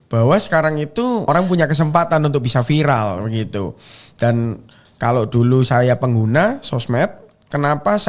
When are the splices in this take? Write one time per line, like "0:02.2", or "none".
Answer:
0:01.3